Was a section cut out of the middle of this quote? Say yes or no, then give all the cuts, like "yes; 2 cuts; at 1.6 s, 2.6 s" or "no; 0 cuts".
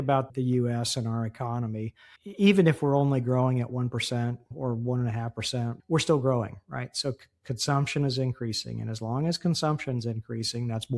yes; 2 cuts; at 4.5 s, 5.8 s